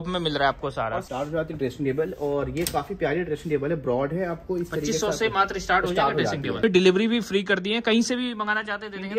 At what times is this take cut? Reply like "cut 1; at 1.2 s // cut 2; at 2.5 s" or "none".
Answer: cut 1; at 1.3 s // cut 2; at 6.6 s

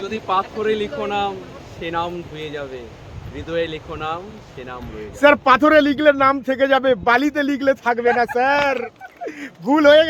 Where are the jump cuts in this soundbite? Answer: none

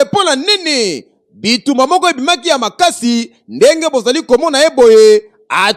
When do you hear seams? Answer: none

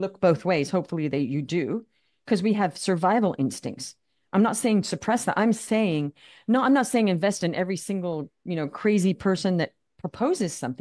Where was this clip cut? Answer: none

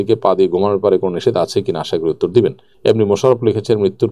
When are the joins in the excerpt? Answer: cut 1; at 2.7 s

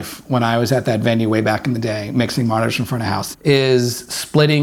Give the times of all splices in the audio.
cut 1; at 3.2 s

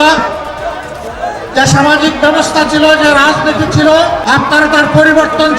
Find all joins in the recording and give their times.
cut 1; at 4.2 s

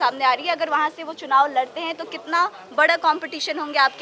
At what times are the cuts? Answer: none

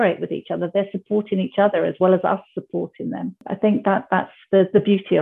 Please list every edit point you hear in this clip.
cut 1; at 3.5 s

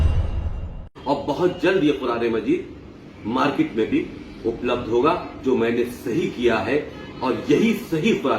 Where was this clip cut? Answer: cut 1; at 0.9 s

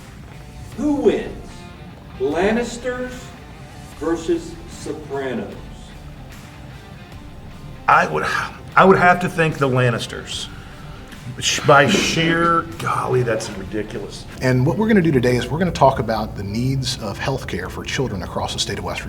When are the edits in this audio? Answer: cut 1; at 14.2 s

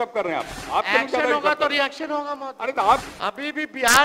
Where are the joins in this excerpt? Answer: cut 1; at 3.0 s

